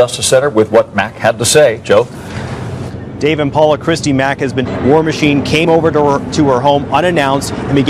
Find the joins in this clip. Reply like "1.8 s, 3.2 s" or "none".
none